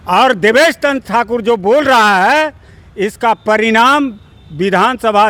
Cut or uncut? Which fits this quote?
uncut